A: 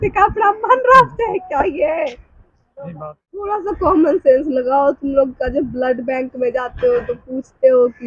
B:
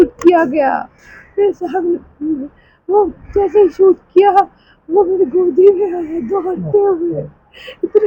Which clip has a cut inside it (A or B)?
A